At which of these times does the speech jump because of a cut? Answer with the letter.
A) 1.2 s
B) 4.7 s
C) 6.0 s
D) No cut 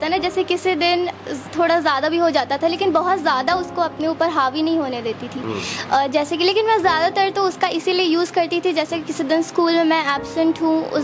D